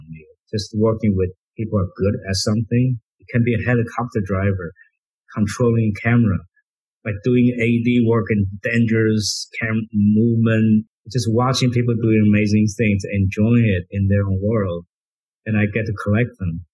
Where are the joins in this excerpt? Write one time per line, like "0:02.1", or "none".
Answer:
0:01.5
0:10.9